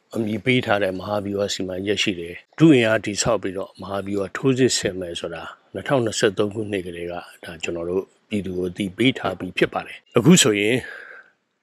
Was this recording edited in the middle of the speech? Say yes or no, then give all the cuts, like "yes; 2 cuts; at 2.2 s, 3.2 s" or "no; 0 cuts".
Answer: yes; 2 cuts; at 2.4 s, 9.9 s